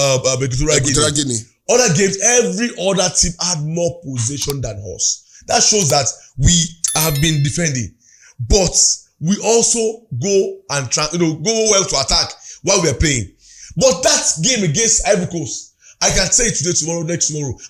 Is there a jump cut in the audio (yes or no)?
no